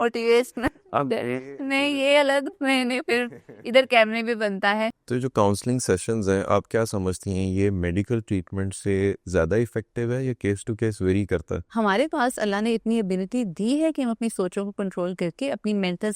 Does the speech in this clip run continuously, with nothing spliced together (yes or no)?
no